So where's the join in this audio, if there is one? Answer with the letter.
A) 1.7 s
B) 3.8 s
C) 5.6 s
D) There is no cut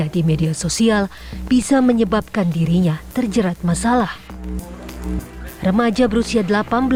D